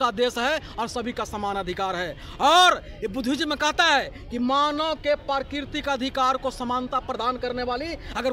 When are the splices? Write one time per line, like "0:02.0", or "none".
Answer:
none